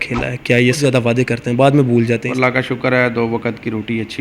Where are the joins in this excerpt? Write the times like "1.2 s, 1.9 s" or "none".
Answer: 0.8 s, 2.3 s